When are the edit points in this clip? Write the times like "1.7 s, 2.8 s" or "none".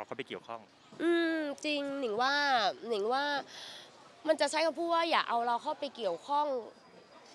none